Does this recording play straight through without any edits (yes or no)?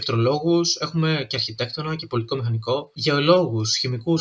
no